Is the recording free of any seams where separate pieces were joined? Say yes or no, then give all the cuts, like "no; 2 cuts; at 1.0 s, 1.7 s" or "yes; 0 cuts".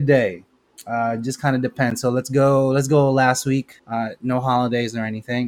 no; 1 cut; at 3.8 s